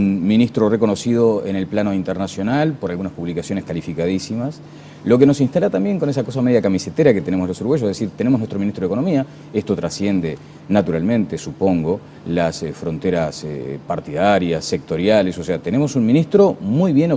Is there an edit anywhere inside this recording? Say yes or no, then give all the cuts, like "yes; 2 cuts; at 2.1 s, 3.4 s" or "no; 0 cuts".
no; 0 cuts